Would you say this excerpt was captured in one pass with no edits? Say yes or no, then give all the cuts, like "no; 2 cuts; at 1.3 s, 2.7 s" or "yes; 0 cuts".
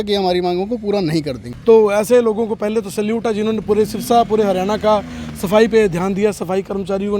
no; 1 cut; at 1.4 s